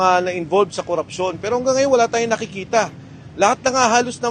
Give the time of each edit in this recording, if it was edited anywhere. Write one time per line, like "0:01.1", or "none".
none